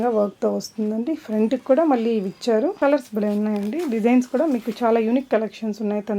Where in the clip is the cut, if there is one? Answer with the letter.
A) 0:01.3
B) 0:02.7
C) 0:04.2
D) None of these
B